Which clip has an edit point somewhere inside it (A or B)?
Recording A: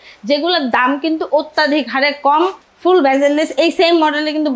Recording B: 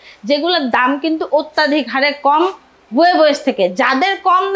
A